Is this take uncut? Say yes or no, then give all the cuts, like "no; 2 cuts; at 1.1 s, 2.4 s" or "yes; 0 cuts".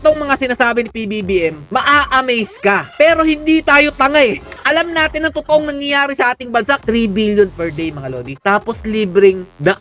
no; 2 cuts; at 4.5 s, 6.8 s